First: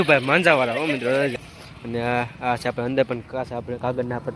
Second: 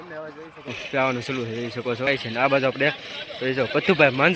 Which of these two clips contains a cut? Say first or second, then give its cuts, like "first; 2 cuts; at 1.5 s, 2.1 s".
first; 1 cut; at 1.4 s